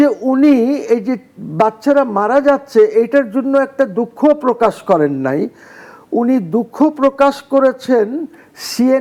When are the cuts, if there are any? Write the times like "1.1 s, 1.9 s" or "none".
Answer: none